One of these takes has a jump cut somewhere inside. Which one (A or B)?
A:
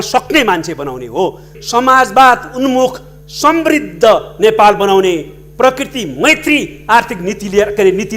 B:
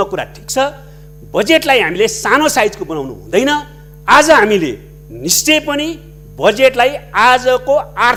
A